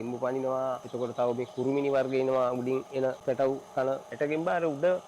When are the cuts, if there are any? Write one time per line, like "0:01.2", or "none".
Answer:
0:00.9
0:03.2
0:04.1